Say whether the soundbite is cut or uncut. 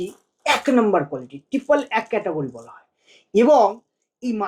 uncut